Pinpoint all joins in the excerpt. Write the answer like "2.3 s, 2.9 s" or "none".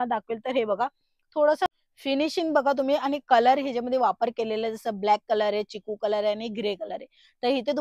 1.7 s